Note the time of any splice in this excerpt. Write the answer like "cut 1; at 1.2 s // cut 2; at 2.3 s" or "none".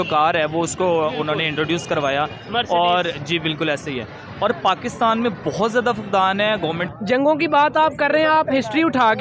cut 1; at 6.9 s

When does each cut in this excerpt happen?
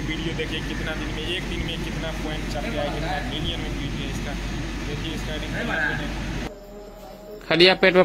cut 1; at 6.4 s

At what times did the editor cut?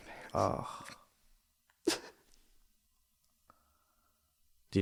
none

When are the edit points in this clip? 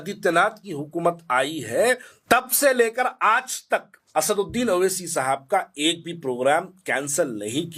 cut 1; at 2.1 s // cut 2; at 4.0 s

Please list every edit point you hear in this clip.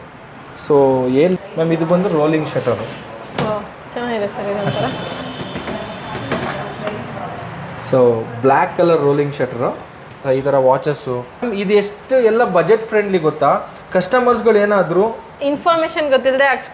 cut 1; at 1.3 s // cut 2; at 10.2 s // cut 3; at 11.5 s

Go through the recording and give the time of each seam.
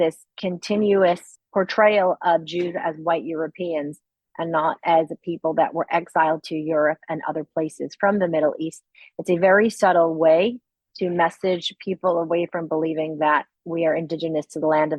none

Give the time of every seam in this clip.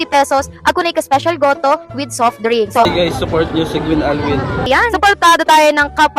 cut 1; at 2.9 s // cut 2; at 4.7 s

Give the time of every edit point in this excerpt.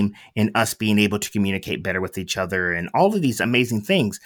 none

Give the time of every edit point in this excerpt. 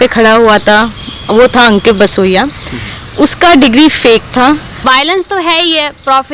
cut 1; at 4.8 s

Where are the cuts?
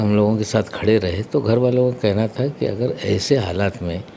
none

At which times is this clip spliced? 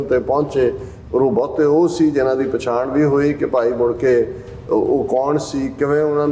cut 1; at 0.9 s

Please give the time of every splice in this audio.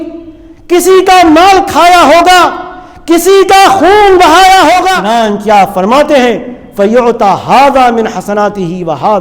cut 1; at 5.0 s

